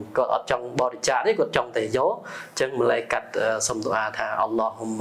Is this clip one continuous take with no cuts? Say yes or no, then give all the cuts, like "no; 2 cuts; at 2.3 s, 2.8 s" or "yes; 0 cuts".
yes; 0 cuts